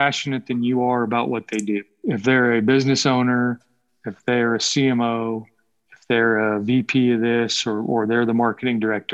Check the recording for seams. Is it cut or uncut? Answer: cut